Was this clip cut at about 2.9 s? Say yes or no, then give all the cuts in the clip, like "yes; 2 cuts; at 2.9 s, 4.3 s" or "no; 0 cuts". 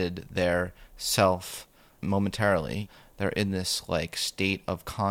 yes; 2 cuts; at 2.0 s, 2.9 s